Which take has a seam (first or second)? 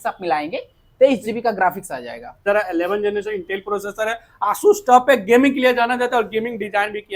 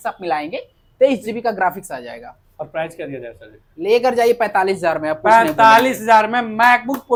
first